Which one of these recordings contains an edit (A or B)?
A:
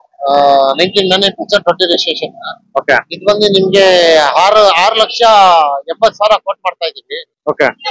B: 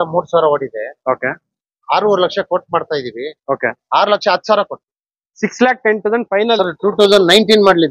B